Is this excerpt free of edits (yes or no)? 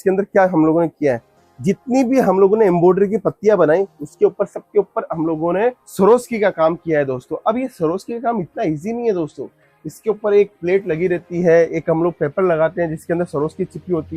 yes